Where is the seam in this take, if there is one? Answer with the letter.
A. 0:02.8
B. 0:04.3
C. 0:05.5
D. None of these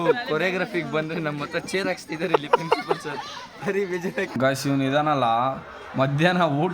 B